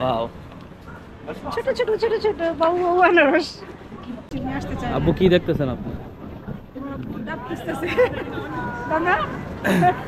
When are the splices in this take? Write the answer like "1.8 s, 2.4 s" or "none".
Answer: 4.3 s